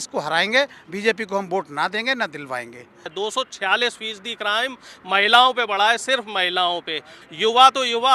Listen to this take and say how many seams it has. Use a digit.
2